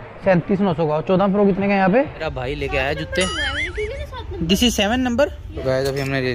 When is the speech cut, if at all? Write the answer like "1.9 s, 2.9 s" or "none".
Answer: 2.3 s, 5.5 s